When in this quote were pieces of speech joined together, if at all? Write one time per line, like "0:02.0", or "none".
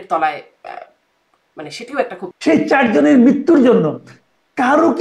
0:02.4